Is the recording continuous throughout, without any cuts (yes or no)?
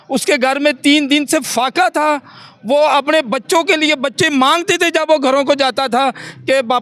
yes